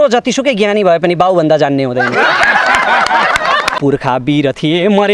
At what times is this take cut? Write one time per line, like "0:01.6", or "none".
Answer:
0:03.7